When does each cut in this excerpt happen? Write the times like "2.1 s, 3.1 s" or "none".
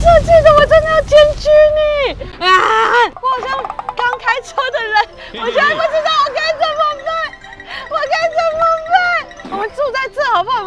2.3 s, 9.3 s